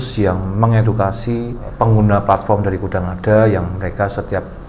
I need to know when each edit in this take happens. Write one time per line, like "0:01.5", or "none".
0:01.7